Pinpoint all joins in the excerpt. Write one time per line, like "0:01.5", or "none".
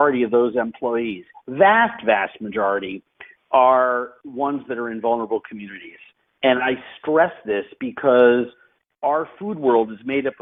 none